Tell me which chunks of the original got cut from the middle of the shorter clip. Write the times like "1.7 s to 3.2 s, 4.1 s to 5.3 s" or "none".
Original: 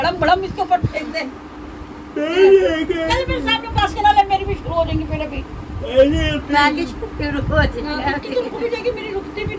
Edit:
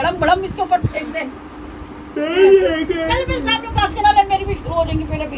none